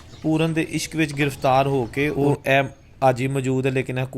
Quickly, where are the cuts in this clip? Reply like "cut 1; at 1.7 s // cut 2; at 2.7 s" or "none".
cut 1; at 2.1 s